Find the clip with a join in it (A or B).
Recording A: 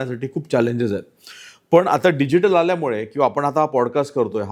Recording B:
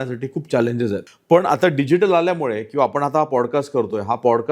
B